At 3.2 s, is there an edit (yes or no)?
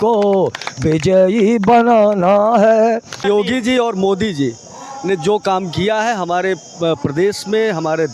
yes